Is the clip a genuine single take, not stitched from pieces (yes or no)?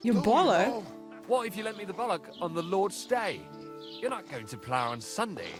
yes